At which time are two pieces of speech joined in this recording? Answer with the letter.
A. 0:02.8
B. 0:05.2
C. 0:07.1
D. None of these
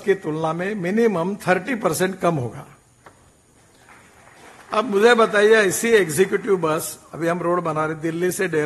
D